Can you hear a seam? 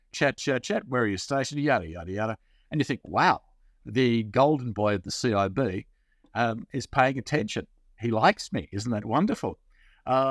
no; 0 cuts

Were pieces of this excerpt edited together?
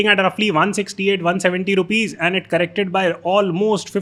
no; 0 cuts

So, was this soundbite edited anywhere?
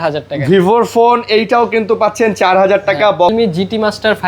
yes; 1 cut; at 3.3 s

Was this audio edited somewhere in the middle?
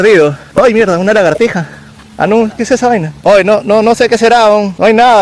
no; 0 cuts

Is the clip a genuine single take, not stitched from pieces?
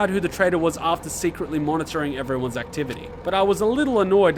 no; 1 cut; at 3.1 s

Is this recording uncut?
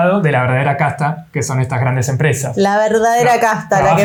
yes; 0 cuts

